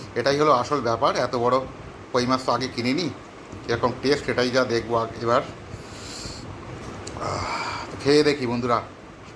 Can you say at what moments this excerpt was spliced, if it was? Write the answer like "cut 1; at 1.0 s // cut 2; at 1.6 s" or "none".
none